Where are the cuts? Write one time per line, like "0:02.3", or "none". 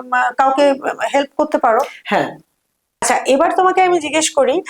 0:02.9